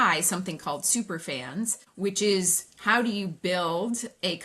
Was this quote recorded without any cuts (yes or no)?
no